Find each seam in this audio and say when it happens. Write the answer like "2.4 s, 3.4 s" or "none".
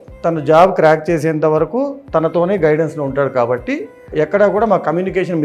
4.1 s